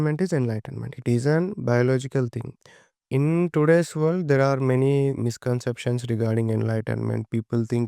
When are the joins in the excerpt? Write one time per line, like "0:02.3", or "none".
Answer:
0:03.0